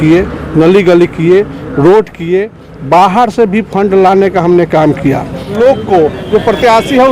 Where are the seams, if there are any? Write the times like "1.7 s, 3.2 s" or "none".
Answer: 5.5 s